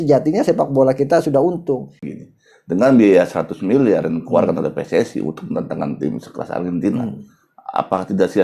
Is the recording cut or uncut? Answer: cut